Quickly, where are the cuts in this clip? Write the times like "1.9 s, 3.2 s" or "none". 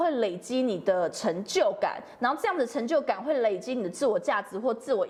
none

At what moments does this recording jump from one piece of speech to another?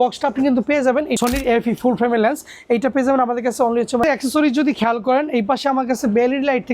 1.1 s, 4.0 s

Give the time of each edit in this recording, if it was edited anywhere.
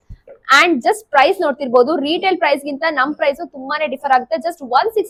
none

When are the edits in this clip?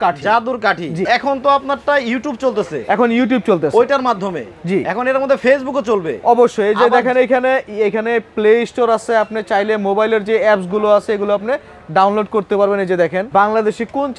1.1 s, 13.2 s

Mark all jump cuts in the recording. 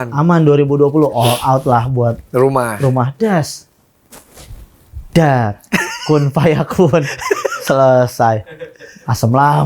none

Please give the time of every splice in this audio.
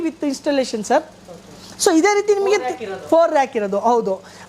none

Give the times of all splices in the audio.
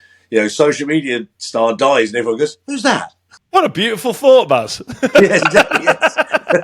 3.3 s

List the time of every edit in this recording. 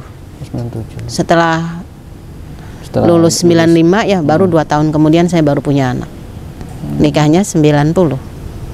none

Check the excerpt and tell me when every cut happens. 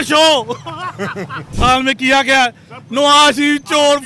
1.4 s

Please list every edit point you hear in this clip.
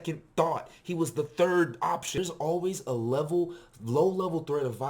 2.1 s

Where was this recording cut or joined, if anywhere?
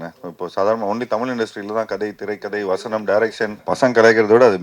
3.6 s

